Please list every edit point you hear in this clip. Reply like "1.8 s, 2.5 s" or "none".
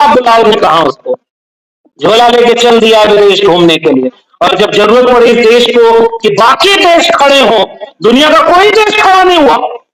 none